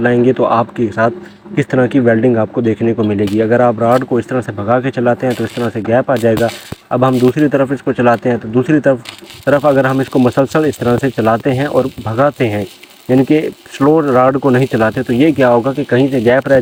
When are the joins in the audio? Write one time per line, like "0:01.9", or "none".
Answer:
none